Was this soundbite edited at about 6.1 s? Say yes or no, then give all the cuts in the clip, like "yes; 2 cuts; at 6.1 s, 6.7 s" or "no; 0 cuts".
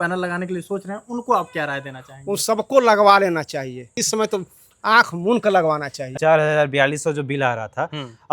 yes; 2 cuts; at 4.0 s, 6.1 s